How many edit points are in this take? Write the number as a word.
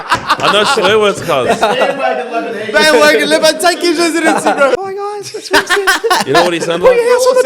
one